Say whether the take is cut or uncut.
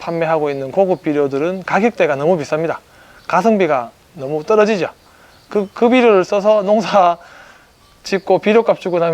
uncut